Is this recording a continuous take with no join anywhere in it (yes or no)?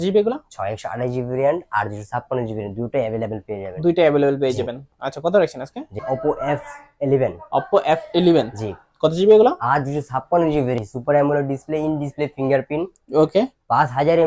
no